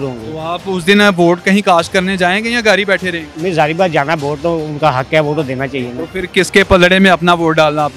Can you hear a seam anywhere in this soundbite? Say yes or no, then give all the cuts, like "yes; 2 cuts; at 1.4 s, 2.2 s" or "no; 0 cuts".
no; 0 cuts